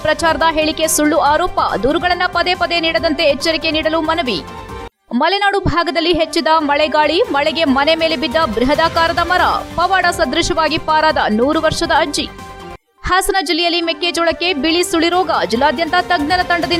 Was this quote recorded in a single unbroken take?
yes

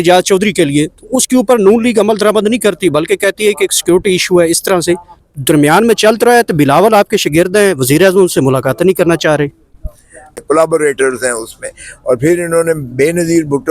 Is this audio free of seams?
no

